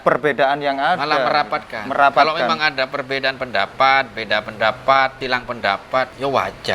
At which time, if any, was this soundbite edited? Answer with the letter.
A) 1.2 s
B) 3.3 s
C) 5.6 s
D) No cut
C